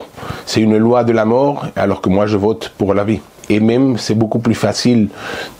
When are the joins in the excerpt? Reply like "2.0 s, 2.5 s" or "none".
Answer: 3.3 s